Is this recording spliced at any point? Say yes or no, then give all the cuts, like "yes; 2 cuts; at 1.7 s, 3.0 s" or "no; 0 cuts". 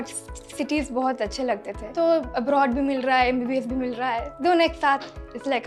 yes; 1 cut; at 1.9 s